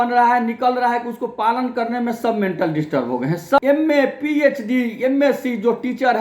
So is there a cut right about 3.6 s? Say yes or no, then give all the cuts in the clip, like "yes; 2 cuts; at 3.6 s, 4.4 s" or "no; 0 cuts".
yes; 1 cut; at 3.6 s